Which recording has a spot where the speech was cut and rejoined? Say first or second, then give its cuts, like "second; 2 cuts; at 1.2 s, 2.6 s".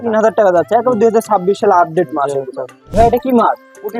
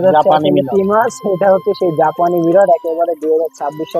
first; 1 cut; at 2.9 s